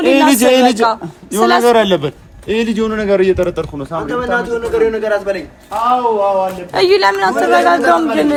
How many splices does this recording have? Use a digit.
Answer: 0